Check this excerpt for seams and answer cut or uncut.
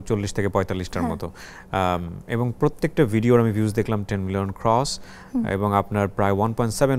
uncut